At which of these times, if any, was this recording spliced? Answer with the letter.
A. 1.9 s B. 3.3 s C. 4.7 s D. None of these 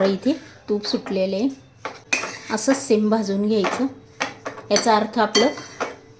A